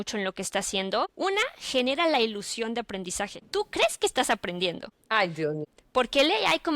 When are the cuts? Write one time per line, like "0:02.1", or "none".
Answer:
0:01.1
0:03.4
0:04.9
0:05.7